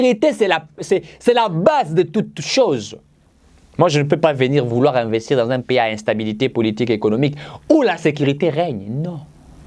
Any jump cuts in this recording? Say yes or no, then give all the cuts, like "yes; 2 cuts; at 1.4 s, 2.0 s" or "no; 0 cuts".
no; 0 cuts